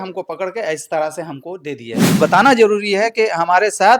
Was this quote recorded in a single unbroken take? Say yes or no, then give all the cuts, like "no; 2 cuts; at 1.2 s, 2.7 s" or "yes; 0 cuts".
no; 1 cut; at 2.1 s